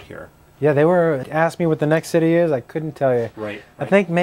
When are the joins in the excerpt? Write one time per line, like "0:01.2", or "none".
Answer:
none